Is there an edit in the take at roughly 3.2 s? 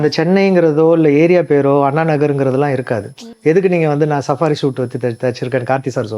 yes; 1 cut; at 3.2 s

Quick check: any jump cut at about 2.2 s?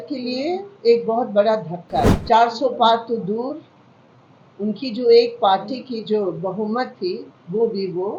yes; 1 cut; at 2.2 s

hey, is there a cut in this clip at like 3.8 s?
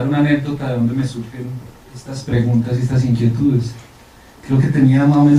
no; 0 cuts

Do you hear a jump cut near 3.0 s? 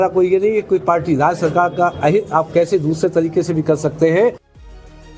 no; 0 cuts

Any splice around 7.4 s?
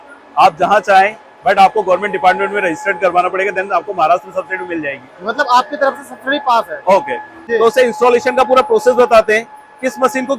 yes; 1 cut; at 7.4 s

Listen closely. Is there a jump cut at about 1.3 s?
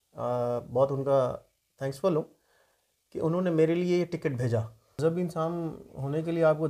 no; 1 cut; at 4.9 s

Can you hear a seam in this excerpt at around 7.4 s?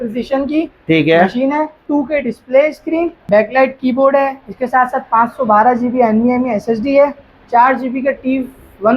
no; 2 cuts; at 1.8 s, 3.2 s

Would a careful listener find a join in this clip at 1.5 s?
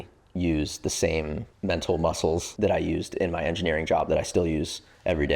yes; 2 cuts; at 1.5 s, 2.5 s

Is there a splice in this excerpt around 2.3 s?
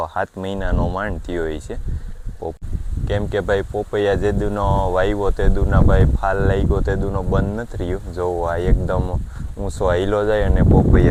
no; 0 cuts

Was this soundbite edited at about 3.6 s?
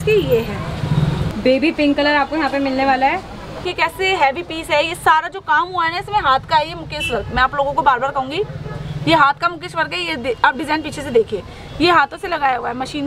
yes; 2 cuts; at 1.2 s, 3.6 s

